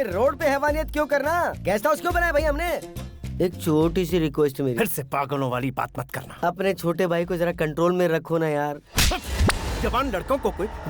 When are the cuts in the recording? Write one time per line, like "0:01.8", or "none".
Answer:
none